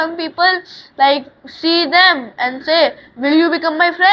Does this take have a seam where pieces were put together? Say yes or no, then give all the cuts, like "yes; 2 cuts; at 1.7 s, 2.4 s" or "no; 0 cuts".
no; 0 cuts